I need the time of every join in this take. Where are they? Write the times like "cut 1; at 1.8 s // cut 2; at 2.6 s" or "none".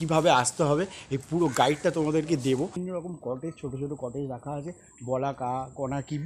cut 1; at 2.8 s